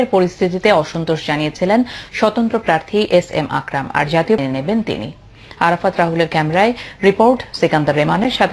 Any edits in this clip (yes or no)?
no